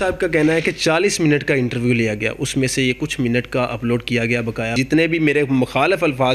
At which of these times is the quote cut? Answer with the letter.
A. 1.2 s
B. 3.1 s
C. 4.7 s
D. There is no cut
C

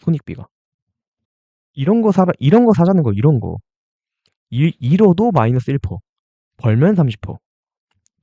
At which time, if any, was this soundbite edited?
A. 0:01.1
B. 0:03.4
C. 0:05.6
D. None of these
D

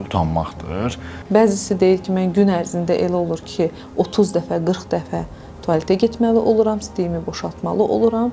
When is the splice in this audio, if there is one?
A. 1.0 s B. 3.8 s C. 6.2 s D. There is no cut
A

